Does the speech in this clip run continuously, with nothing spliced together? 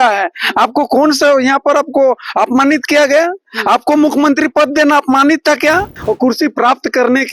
no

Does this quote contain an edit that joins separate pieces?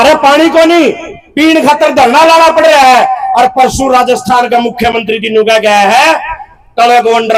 no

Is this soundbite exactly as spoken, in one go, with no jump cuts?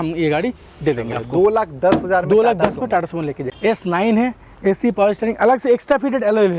no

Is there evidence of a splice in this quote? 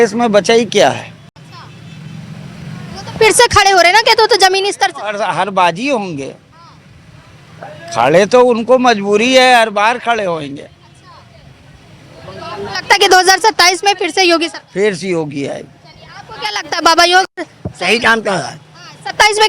no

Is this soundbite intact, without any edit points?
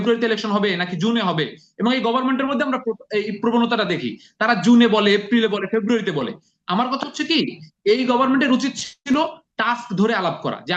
yes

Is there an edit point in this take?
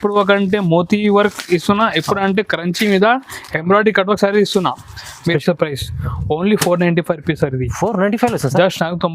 yes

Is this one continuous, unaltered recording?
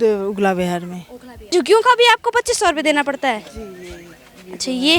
no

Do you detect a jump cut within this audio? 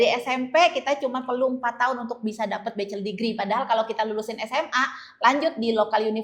no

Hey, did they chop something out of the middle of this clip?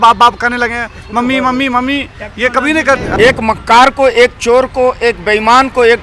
yes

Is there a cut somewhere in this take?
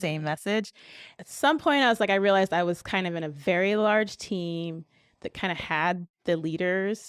yes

